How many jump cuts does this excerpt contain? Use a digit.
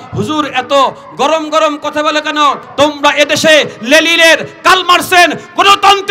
1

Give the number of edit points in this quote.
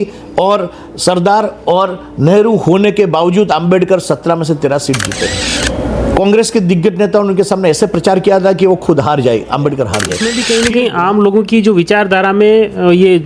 2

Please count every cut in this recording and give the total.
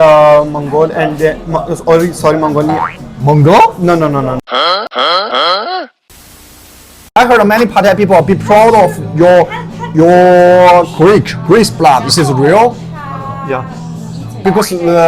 1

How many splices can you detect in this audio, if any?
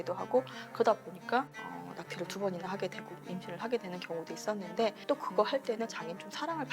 1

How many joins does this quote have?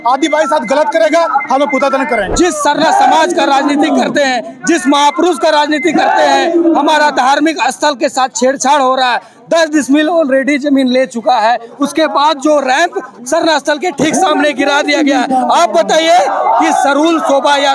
1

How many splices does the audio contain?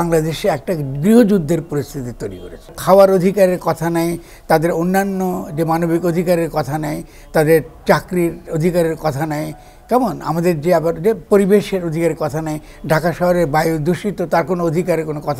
1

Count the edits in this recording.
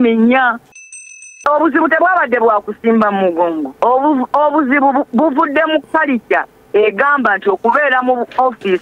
2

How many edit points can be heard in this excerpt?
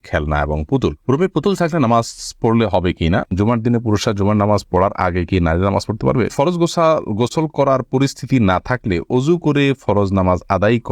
2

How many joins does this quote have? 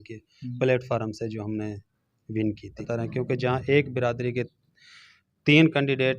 1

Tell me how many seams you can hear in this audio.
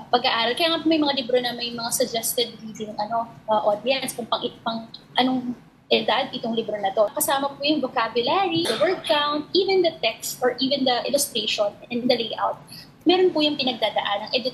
2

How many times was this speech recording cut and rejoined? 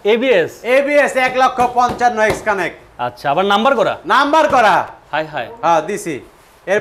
0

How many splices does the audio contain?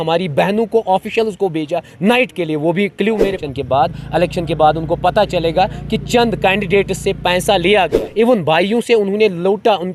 2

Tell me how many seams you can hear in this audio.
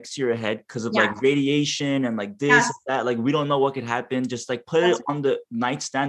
0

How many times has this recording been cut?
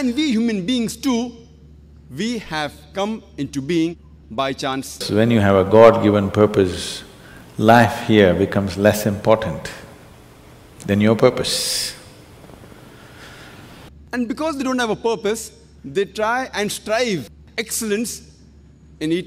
2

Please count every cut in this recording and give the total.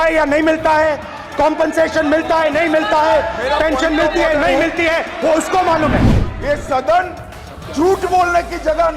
1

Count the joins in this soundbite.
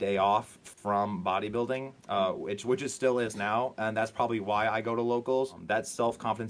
1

